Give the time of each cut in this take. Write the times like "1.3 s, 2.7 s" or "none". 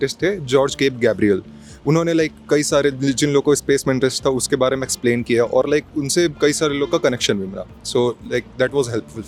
none